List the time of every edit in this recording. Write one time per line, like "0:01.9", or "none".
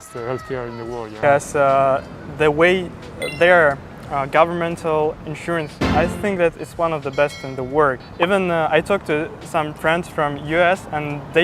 0:01.2
0:08.0